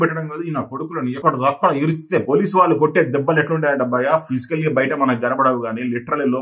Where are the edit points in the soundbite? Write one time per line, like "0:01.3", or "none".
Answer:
0:01.2